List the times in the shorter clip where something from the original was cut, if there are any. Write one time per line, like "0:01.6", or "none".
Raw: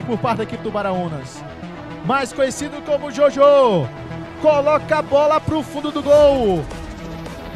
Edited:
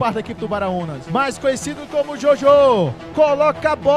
0:01.0
0:03.0